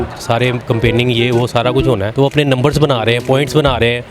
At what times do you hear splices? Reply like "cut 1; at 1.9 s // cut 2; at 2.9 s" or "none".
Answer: cut 1; at 2.1 s